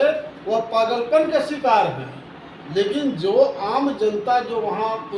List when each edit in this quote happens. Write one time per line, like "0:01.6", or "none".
none

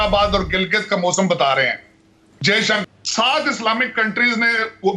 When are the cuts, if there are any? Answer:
0:02.8

